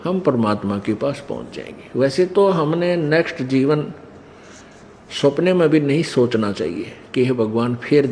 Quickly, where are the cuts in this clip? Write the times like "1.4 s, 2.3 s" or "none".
none